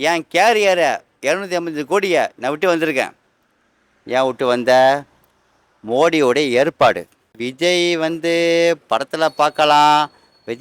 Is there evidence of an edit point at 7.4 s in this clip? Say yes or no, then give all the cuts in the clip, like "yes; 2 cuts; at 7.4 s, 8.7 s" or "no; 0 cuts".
yes; 1 cut; at 7.4 s